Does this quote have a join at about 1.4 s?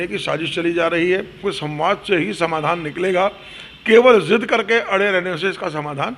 yes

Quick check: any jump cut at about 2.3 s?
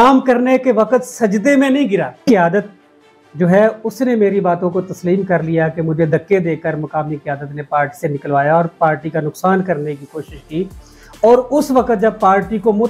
yes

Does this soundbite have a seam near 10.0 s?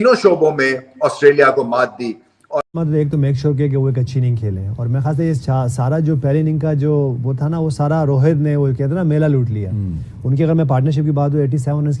no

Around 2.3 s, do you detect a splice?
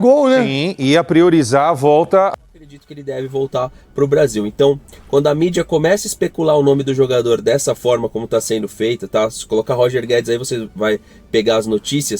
yes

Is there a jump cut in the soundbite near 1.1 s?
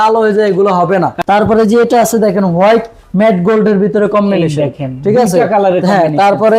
yes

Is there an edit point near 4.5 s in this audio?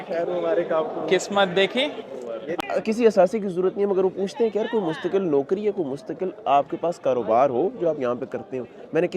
no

